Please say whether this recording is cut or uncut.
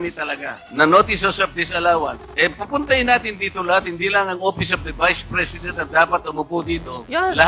uncut